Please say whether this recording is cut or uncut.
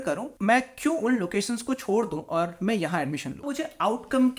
cut